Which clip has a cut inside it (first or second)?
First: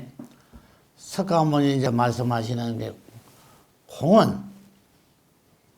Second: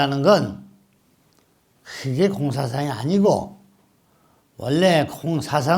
first